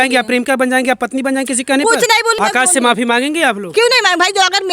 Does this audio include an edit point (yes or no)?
yes